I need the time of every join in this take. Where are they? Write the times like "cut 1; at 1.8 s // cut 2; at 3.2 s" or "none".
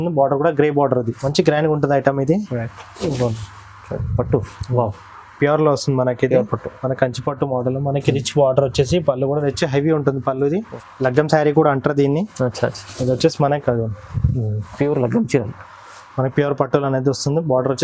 cut 1; at 1.2 s // cut 2; at 10.8 s